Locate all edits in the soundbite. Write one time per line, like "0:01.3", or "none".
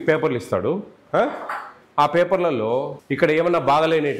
0:03.0